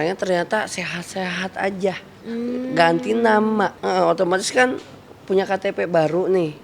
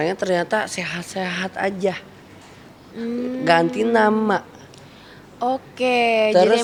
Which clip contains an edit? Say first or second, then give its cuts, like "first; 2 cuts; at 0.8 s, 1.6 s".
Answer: first; 2 cuts; at 2.1 s, 3.8 s